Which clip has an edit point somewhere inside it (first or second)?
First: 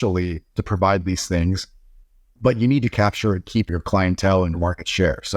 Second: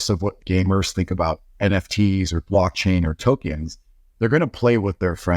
first